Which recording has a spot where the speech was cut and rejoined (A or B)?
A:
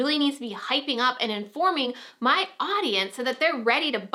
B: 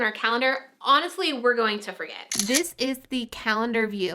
B